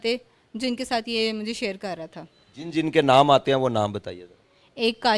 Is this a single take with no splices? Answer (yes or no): yes